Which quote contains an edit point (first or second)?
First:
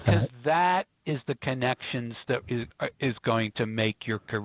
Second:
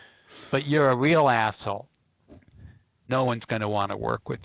second